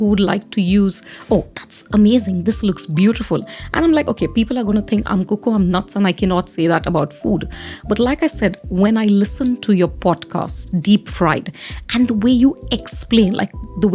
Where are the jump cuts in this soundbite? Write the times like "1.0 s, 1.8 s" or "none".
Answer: none